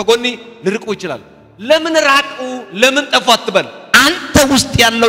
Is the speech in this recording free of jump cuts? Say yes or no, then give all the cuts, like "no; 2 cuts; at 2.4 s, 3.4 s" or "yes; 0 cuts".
yes; 0 cuts